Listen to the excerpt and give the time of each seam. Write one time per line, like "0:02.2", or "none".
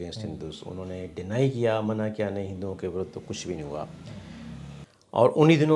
0:04.9